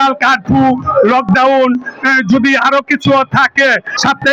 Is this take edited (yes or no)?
no